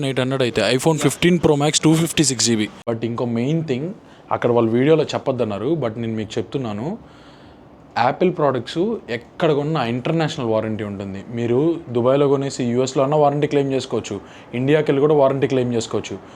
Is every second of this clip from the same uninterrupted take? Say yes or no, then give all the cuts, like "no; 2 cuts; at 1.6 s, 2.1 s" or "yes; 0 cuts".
no; 1 cut; at 2.8 s